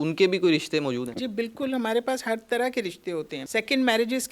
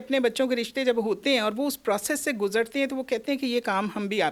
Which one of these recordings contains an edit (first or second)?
first